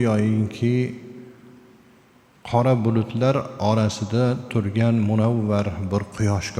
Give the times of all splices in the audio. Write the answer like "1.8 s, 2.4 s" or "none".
none